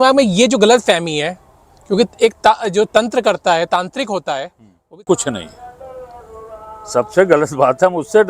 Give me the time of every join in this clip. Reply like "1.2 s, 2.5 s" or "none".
5.0 s

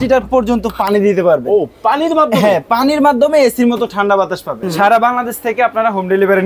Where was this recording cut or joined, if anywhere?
4.6 s

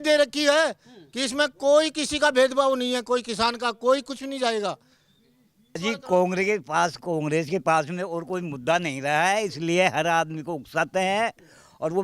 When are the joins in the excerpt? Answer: 5.8 s

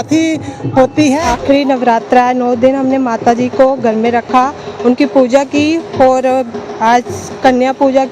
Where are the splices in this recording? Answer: 1.3 s

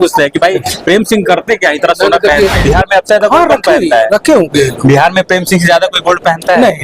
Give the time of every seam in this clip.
2.6 s

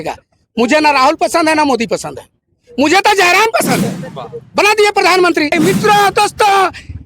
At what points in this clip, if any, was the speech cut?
5.5 s

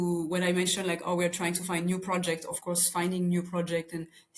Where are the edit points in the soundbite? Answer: none

